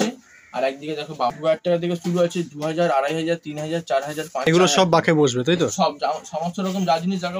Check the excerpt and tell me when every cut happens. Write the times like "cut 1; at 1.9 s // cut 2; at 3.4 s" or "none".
cut 1; at 1.3 s // cut 2; at 4.3 s